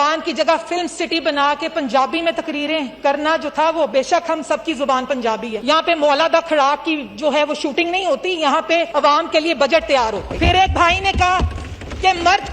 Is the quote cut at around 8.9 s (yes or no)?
yes